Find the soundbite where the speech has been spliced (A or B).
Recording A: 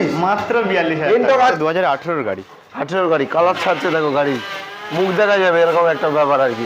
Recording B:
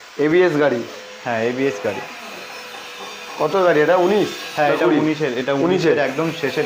A